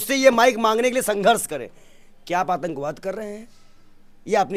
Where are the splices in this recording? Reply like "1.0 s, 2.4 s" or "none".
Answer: none

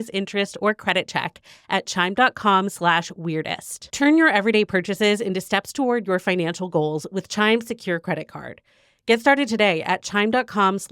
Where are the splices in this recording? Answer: 3.8 s

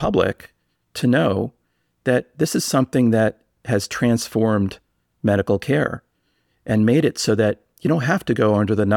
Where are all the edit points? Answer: none

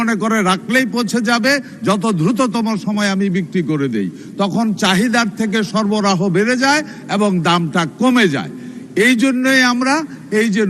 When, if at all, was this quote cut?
none

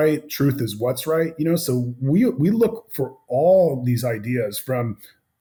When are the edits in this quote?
none

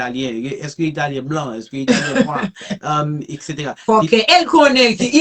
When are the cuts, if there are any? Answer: none

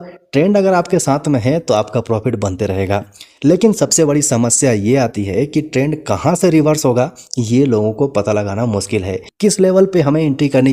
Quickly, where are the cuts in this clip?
9.2 s

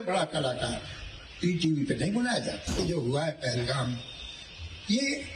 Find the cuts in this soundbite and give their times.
2.8 s

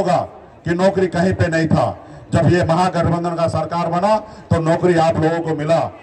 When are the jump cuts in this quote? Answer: none

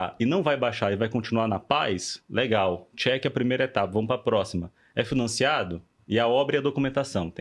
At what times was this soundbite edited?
none

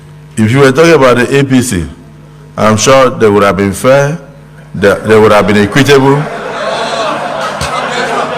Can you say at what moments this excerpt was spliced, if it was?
none

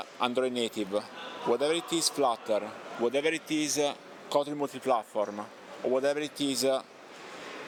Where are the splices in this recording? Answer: none

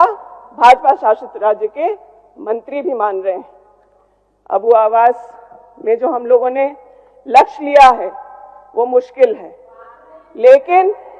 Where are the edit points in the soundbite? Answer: none

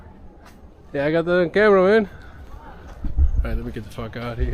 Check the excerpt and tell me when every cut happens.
2.5 s

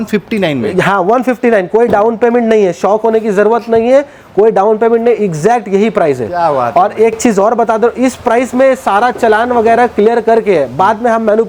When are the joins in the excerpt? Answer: none

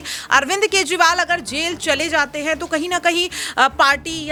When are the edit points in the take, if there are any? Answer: none

